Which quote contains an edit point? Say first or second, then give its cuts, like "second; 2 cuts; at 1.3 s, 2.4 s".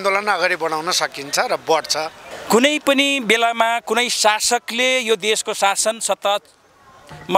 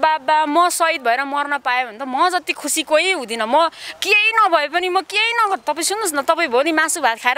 first; 1 cut; at 2.3 s